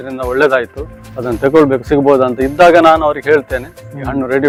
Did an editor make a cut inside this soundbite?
no; 0 cuts

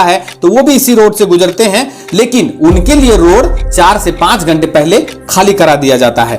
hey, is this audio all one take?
yes; 0 cuts

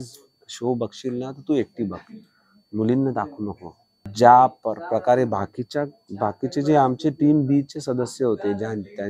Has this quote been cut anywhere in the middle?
yes; 1 cut; at 4.1 s

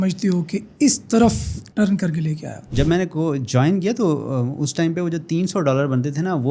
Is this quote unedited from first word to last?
no; 1 cut; at 2.6 s

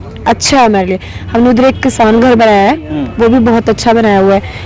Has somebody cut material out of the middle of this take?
no; 0 cuts

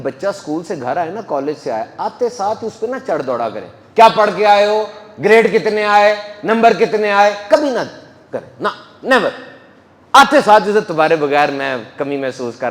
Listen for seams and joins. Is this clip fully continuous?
yes; 0 cuts

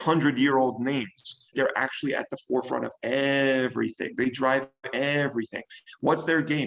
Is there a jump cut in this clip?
yes; 1 cut; at 1.5 s

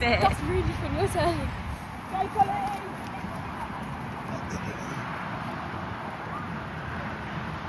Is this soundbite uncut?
yes; 0 cuts

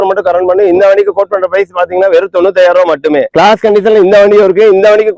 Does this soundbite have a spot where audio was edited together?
yes; 1 cut; at 3.3 s

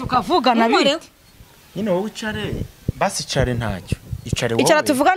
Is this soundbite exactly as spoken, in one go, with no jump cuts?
yes; 0 cuts

